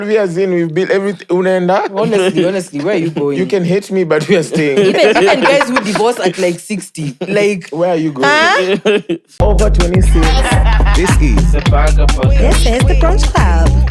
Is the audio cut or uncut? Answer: cut